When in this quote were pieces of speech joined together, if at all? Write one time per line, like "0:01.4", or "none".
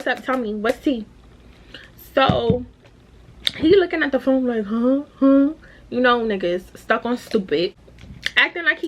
none